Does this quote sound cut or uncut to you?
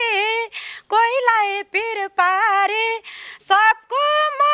uncut